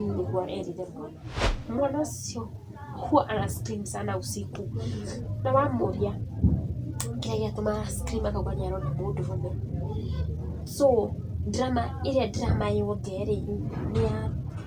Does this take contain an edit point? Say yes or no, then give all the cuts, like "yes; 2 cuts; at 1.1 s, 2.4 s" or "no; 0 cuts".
yes; 1 cut; at 1.2 s